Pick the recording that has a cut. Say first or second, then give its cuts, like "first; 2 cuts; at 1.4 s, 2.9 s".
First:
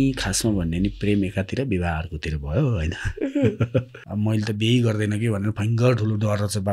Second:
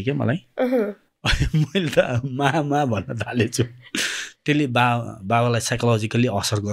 first; 1 cut; at 4.0 s